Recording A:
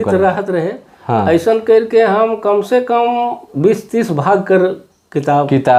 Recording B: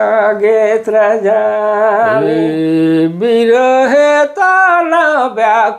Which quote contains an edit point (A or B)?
B